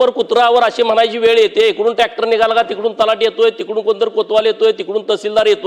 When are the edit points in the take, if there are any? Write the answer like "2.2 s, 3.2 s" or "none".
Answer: none